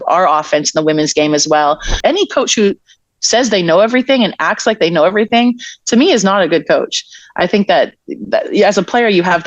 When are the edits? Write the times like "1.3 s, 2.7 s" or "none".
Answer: 2.0 s